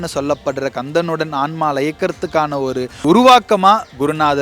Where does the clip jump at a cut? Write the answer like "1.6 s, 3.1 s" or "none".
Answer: 3.0 s